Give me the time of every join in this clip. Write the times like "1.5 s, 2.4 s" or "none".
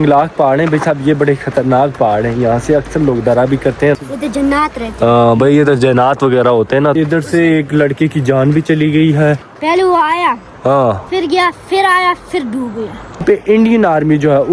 4.0 s, 7.0 s, 9.5 s, 13.2 s